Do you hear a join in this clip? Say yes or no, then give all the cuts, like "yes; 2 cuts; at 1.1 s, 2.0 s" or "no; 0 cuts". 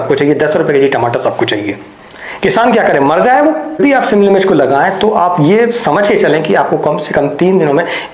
yes; 1 cut; at 3.8 s